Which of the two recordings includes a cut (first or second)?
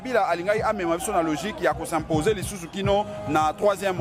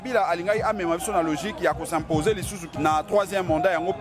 second